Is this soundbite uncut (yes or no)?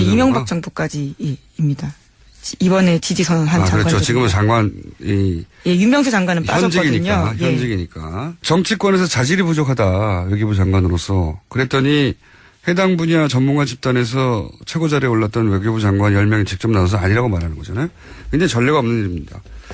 yes